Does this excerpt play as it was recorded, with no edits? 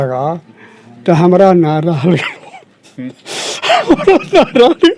yes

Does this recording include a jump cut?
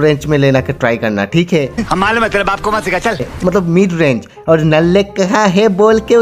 no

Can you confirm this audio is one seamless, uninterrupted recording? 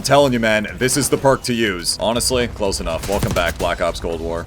no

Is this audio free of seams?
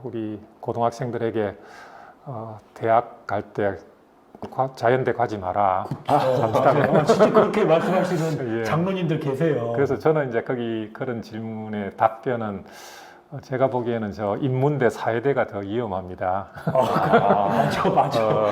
yes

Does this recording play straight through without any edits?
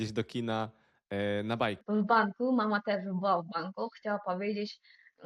no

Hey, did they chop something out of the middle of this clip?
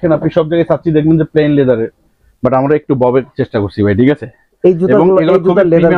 no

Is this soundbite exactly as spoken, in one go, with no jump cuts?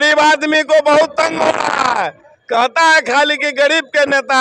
yes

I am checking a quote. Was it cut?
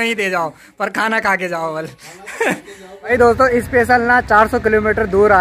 yes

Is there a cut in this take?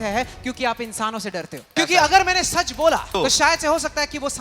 yes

